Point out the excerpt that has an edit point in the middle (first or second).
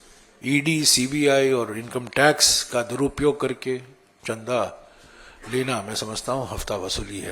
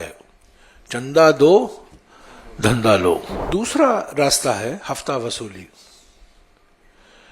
second